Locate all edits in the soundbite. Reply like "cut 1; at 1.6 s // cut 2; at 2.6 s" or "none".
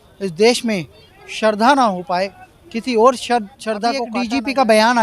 cut 1; at 4.1 s

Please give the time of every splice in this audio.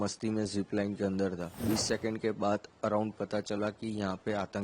cut 1; at 1.6 s

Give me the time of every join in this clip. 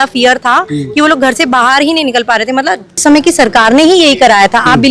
cut 1; at 3.0 s

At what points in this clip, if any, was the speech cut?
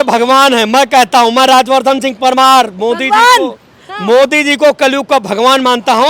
none

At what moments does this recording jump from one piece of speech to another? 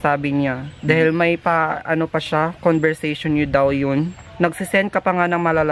cut 1; at 1.8 s // cut 2; at 4.2 s

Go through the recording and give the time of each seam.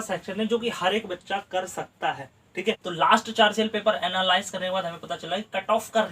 cut 1; at 2.8 s

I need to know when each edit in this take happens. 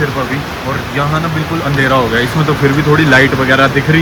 none

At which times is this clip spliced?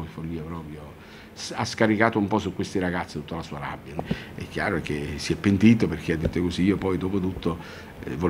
cut 1; at 4.1 s

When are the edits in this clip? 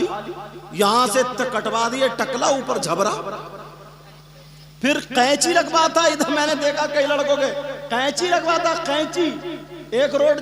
none

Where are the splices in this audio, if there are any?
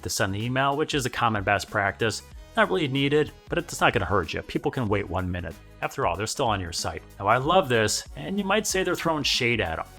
cut 1; at 7.0 s

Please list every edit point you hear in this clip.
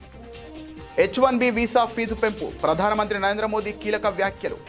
cut 1; at 1.0 s

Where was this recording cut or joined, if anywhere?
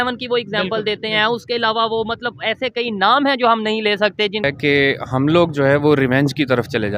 cut 1; at 4.4 s

